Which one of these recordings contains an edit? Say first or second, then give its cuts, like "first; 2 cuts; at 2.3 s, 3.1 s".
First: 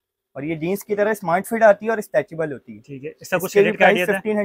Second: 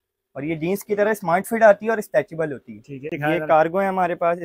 second; 1 cut; at 3.1 s